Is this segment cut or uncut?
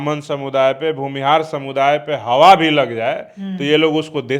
uncut